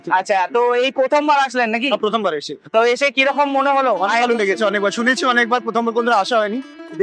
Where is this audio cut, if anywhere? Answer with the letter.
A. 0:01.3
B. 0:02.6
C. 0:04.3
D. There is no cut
D